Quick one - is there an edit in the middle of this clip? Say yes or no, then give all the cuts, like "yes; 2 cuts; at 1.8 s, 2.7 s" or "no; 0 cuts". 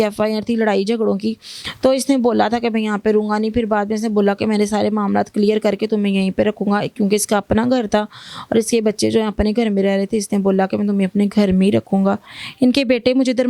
no; 0 cuts